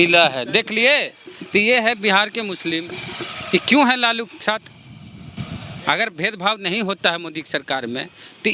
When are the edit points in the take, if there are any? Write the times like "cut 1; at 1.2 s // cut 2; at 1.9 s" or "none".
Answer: none